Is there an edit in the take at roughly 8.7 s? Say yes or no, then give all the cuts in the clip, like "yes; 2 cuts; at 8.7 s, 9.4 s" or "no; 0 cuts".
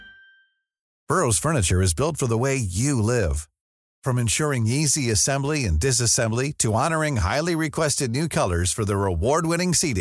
no; 1 cut; at 1.0 s